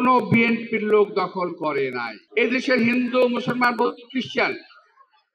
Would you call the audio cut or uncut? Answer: cut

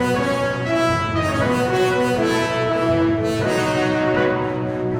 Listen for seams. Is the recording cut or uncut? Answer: uncut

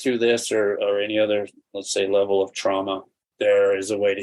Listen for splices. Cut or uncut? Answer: cut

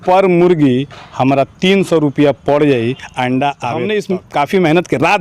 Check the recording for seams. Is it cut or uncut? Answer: cut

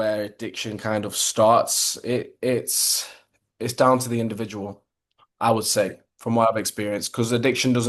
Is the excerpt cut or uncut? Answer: uncut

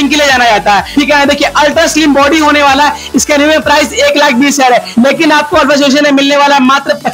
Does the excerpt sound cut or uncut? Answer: uncut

